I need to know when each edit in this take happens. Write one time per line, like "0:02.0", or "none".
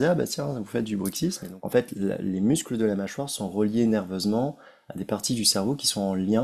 0:01.5